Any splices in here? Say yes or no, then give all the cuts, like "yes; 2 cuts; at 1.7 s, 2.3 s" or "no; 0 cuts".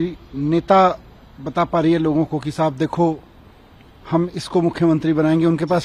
no; 0 cuts